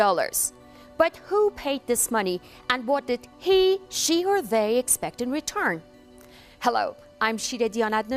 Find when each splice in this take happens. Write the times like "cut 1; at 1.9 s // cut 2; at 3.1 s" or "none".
cut 1; at 3.3 s